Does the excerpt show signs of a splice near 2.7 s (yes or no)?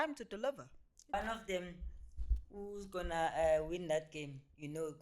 no